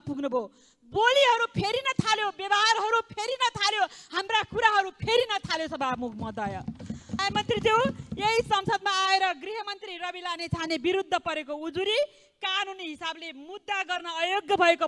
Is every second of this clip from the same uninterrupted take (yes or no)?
no